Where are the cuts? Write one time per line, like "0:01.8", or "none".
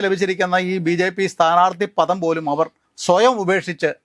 0:02.9

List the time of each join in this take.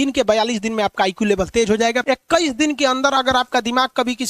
0:02.0

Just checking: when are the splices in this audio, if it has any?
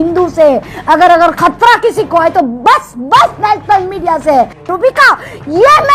0:04.7

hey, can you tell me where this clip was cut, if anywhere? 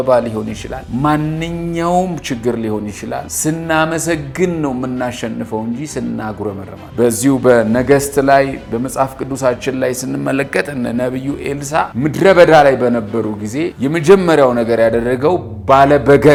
none

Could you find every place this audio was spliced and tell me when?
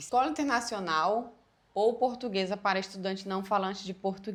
none

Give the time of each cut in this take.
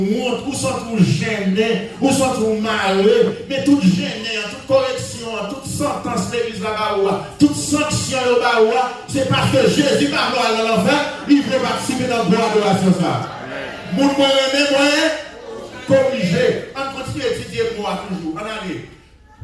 none

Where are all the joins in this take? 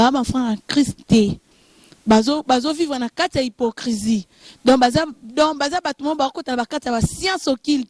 none

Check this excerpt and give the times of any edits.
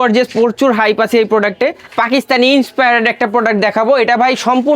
0:01.8

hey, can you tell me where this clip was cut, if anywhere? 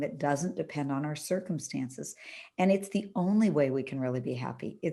none

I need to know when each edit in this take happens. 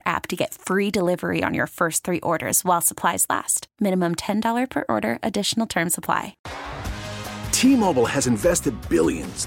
0:06.4

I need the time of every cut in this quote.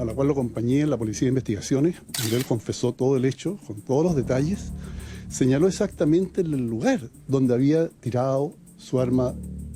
none

